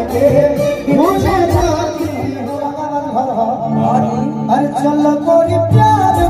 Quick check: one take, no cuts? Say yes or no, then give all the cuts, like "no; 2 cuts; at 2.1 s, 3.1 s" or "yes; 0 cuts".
no; 1 cut; at 2.3 s